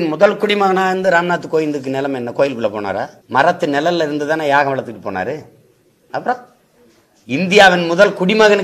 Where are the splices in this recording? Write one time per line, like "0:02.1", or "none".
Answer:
0:03.2